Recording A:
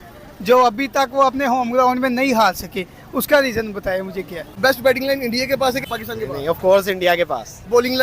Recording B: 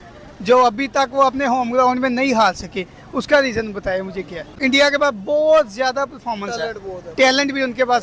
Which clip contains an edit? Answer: A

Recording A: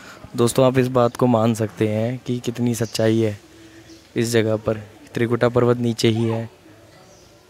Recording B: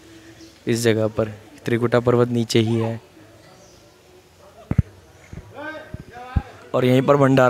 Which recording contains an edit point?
B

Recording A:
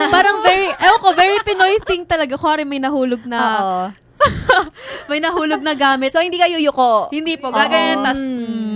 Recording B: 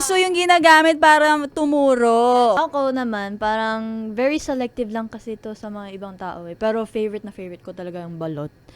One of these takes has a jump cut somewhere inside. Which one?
B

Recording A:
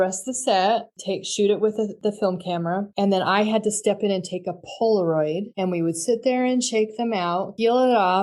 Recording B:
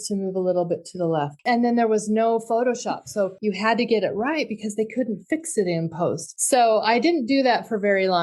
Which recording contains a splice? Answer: B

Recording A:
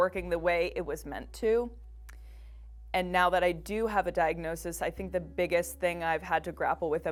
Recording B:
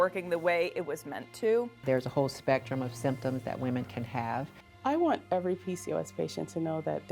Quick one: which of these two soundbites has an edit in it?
B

